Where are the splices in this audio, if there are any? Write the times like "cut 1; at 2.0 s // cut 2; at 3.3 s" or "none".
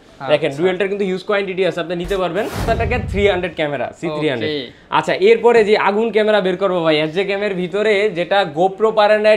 cut 1; at 2.7 s